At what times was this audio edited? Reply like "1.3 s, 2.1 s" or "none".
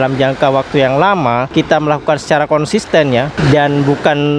1.5 s, 3.3 s